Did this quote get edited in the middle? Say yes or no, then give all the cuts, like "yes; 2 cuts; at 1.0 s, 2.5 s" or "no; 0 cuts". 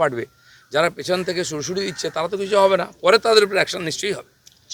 no; 0 cuts